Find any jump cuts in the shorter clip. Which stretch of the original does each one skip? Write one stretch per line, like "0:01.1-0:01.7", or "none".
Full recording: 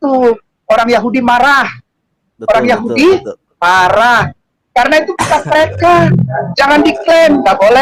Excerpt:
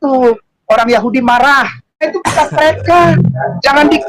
0:02.1-0:05.0